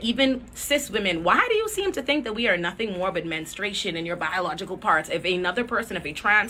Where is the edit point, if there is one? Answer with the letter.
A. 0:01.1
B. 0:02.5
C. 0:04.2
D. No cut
D